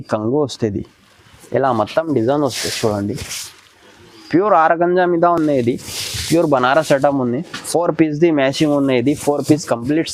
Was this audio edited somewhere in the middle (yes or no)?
no